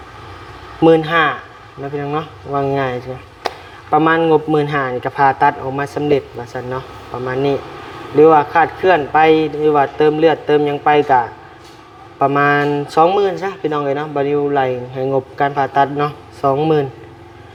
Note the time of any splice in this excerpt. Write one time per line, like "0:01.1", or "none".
none